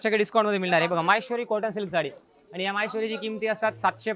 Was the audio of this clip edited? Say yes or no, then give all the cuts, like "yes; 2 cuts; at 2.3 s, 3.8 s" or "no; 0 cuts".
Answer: no; 0 cuts